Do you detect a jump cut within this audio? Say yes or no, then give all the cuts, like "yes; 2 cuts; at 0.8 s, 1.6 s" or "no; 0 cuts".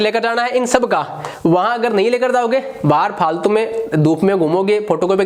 no; 0 cuts